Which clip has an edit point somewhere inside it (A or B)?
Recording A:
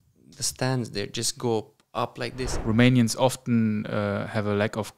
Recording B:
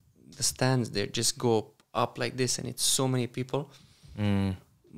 A